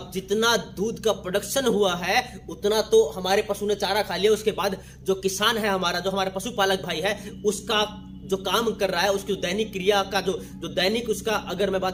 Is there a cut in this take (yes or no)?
no